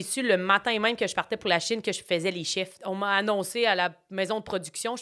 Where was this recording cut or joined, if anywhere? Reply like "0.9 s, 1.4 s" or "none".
2.8 s